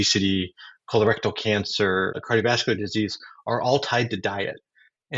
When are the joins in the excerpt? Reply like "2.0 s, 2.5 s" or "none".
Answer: 2.2 s